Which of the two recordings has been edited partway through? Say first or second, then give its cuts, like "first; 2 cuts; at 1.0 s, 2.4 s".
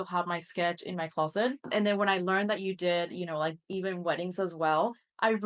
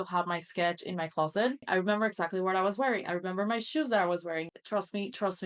second; 2 cuts; at 1.6 s, 4.5 s